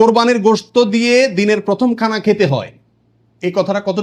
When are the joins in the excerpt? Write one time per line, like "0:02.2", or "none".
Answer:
none